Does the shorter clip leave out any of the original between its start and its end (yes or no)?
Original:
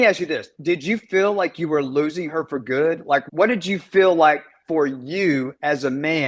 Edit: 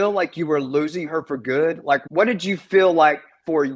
no